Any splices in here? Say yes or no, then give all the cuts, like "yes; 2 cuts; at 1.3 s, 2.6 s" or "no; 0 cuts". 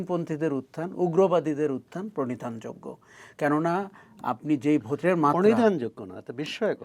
no; 0 cuts